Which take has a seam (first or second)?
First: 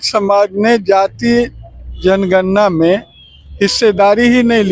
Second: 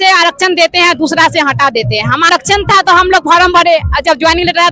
second